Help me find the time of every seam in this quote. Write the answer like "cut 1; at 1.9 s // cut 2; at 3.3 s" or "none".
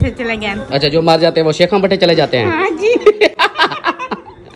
none